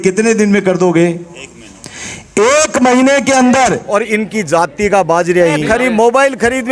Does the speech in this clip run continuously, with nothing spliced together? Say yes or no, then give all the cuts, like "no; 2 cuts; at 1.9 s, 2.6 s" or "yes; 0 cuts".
no; 2 cuts; at 3.8 s, 5.6 s